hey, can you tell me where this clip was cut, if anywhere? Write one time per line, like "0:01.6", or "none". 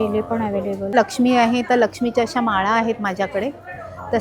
0:00.9